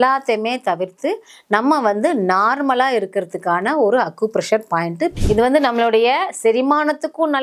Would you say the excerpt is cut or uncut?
cut